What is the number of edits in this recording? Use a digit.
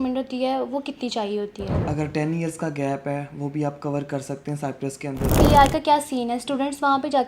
2